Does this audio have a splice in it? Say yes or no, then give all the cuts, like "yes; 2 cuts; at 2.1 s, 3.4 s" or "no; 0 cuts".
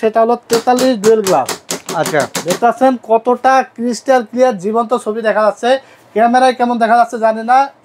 no; 0 cuts